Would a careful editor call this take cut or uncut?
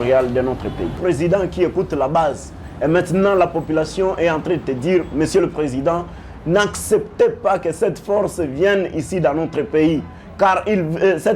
cut